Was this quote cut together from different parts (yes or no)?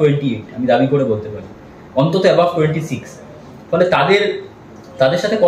no